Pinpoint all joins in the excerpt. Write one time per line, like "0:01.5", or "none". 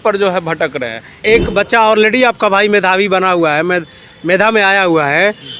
0:01.2